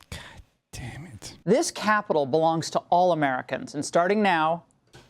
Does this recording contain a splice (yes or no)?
yes